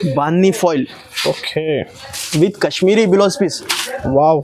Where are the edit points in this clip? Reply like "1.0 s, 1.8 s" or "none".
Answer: none